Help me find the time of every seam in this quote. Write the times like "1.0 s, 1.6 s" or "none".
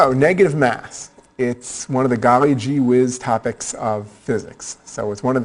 none